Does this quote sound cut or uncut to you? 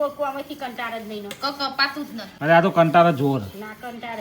cut